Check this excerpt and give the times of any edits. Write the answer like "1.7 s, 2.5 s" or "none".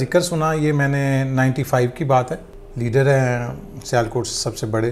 2.5 s